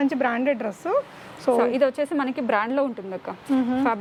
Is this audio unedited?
yes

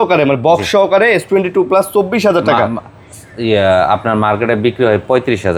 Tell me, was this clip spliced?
no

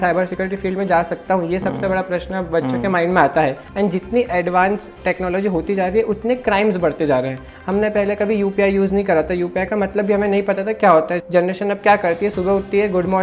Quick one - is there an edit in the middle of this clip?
yes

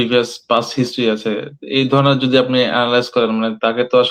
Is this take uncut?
yes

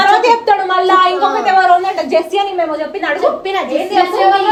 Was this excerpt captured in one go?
yes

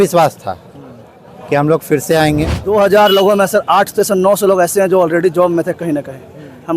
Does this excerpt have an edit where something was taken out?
yes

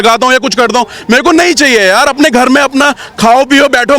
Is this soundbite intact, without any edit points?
yes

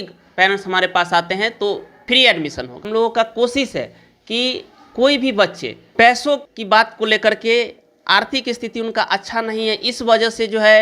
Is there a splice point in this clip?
yes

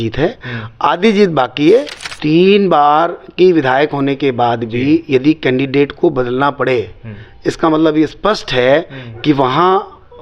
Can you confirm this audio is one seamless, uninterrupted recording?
no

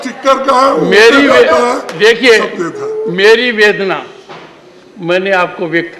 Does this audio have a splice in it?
no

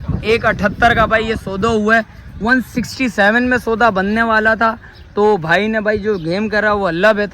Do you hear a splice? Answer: no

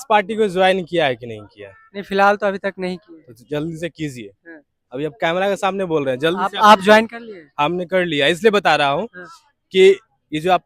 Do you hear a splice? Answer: no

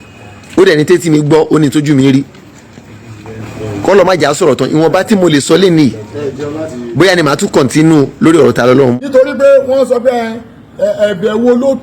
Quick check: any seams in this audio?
yes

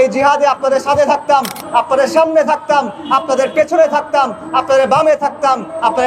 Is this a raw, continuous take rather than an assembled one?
yes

